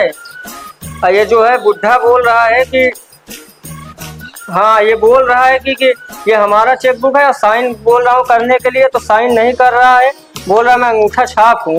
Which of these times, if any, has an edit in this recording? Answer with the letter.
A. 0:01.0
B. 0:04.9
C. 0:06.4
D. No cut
D